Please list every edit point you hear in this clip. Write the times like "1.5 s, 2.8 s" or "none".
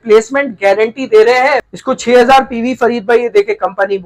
1.7 s